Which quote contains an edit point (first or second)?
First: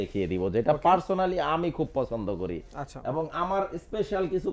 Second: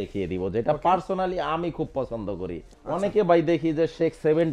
second